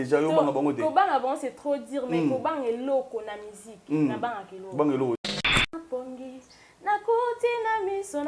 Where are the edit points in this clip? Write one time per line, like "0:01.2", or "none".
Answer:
0:05.7

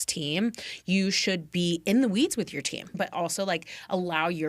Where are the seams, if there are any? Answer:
0:03.0

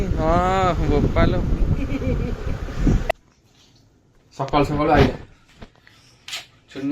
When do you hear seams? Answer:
0:03.3

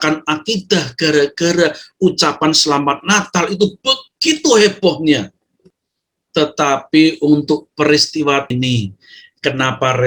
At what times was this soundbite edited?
0:08.5

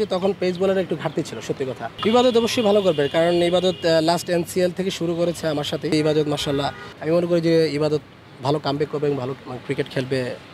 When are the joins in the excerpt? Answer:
0:01.9
0:05.9
0:06.9

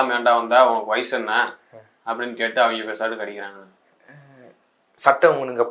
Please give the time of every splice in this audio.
none

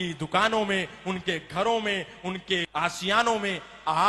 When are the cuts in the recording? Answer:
0:02.7

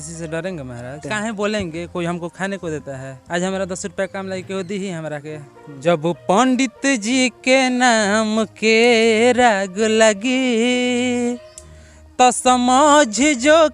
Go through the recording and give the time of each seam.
0:01.0
0:03.1
0:05.8

